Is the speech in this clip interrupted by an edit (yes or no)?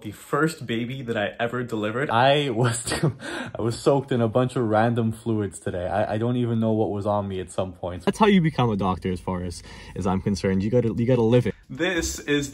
yes